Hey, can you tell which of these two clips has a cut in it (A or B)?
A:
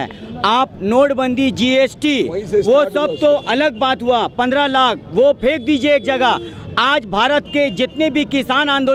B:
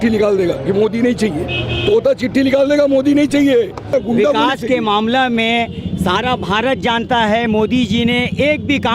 B